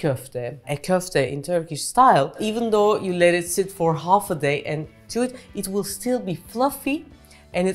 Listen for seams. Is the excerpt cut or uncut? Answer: uncut